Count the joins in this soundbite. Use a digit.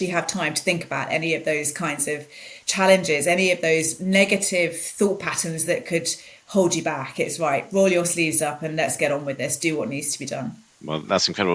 0